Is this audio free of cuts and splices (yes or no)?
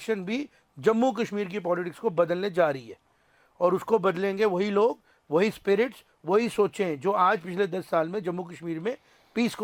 yes